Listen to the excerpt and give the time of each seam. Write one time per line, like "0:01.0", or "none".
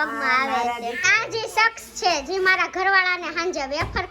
0:01.0